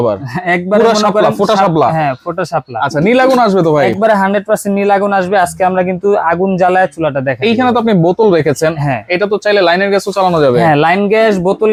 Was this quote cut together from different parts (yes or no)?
no